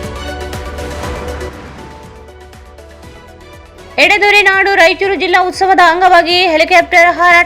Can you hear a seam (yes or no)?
yes